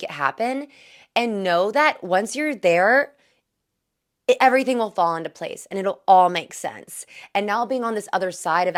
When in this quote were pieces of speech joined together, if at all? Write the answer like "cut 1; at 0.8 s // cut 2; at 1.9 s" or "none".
none